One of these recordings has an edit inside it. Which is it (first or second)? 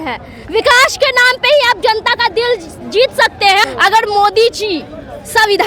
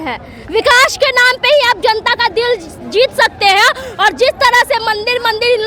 first